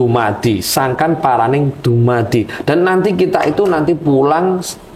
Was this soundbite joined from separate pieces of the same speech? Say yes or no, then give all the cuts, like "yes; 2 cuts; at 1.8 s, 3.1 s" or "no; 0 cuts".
no; 0 cuts